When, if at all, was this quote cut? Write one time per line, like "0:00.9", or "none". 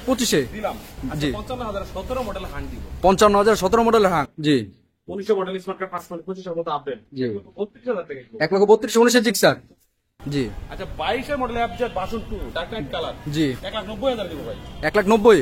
0:00.9
0:04.3
0:10.1